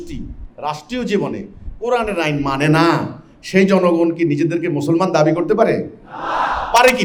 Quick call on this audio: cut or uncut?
uncut